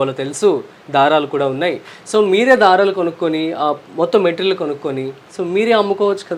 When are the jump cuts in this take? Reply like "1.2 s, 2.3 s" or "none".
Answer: none